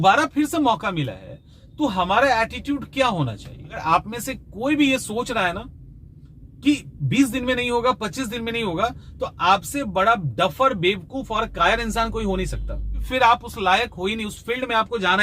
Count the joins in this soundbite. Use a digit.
2